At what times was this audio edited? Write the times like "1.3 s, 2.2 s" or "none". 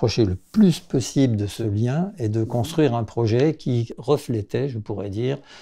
1.5 s, 3.9 s